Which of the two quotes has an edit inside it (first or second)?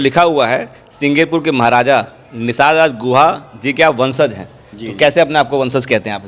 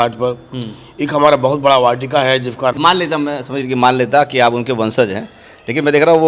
second